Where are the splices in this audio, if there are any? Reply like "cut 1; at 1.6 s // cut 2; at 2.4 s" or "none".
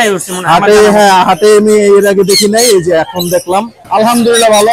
cut 1; at 3.8 s